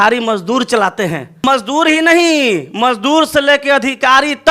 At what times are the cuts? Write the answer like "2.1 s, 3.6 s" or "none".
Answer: 1.4 s